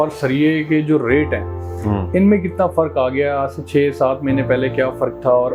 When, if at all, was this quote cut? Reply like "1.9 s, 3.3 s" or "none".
none